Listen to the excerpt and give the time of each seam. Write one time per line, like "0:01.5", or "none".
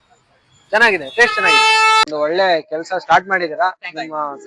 0:02.1